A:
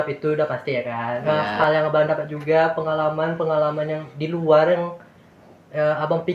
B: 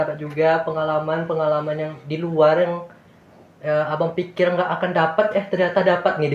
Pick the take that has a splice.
A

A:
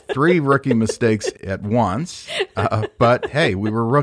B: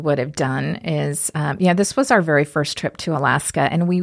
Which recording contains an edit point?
A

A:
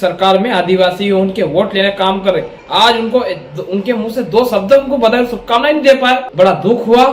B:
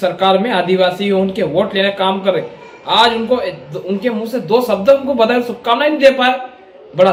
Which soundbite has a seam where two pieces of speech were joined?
A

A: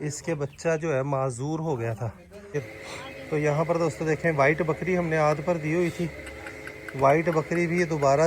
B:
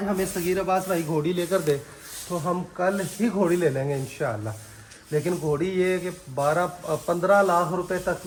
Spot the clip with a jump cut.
A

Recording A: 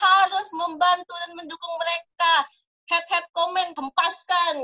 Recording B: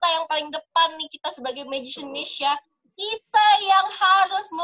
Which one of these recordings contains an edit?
A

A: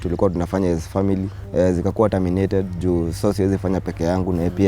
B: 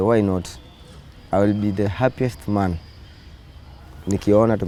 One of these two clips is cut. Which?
A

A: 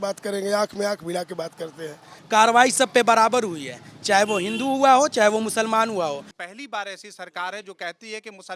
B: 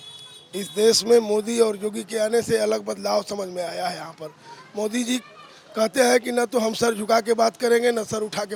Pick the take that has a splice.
A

